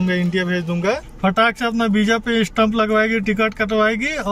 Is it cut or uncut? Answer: cut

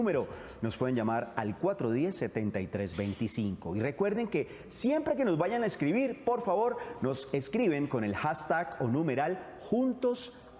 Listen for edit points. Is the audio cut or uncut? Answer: cut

